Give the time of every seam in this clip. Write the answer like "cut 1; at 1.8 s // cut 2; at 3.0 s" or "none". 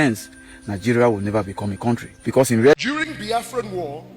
cut 1; at 2.7 s